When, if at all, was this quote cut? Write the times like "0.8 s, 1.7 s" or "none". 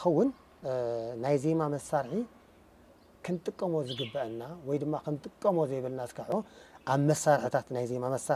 6.2 s